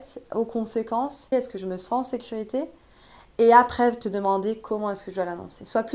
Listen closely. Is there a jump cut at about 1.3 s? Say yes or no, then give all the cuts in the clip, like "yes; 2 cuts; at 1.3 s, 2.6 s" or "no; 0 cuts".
yes; 1 cut; at 1.3 s